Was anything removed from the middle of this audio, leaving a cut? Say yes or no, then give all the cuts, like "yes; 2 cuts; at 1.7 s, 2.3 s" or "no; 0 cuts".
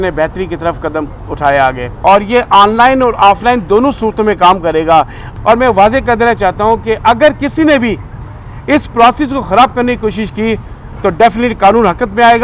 yes; 2 cuts; at 1.9 s, 5.2 s